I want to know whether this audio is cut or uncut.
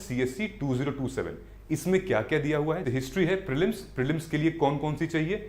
cut